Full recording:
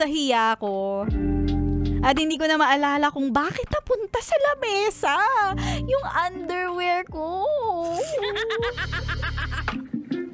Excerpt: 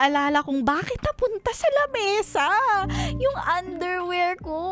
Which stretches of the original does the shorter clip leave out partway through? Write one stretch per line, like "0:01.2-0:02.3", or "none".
none